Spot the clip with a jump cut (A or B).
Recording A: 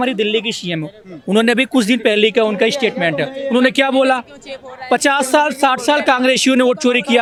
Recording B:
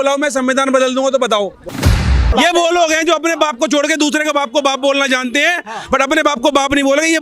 B